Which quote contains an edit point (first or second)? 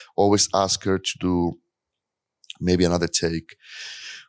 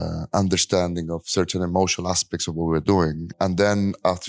second